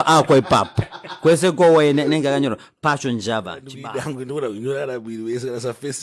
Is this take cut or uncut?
cut